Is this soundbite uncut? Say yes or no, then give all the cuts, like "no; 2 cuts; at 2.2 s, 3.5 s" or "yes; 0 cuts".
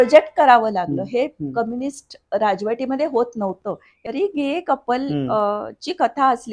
no; 1 cut; at 4.1 s